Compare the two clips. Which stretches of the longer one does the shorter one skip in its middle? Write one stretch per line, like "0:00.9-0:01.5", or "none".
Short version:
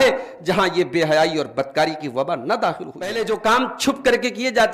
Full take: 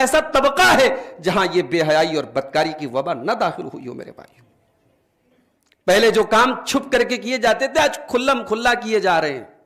0:03.9-0:06.0